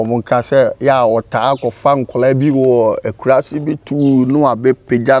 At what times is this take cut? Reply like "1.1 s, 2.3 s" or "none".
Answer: none